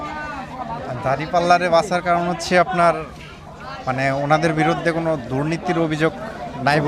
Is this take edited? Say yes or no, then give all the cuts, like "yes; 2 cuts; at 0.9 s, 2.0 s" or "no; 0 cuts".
no; 0 cuts